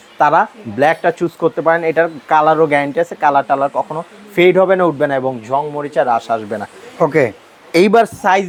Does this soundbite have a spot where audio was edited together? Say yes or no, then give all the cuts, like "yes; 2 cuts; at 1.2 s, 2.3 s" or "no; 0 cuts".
no; 0 cuts